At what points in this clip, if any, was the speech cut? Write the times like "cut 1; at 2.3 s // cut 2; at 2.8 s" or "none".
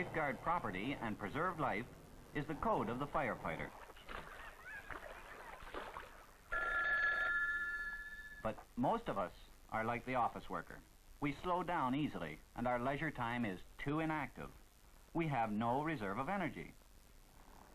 none